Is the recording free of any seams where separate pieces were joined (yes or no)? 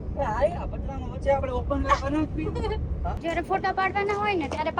no